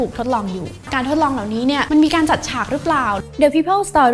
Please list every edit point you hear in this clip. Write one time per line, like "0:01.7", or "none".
0:00.9
0:01.8
0:03.2